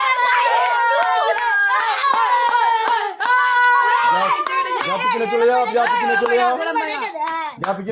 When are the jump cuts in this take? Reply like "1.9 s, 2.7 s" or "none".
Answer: none